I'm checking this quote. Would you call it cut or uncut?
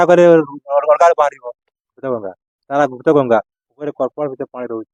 uncut